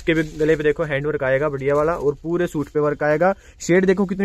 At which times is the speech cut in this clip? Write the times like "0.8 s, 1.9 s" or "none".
none